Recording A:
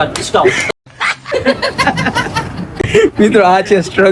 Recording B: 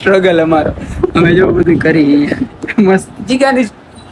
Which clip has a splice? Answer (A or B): A